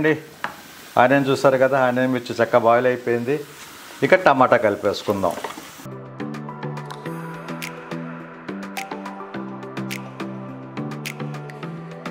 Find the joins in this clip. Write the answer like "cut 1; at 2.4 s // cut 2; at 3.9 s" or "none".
none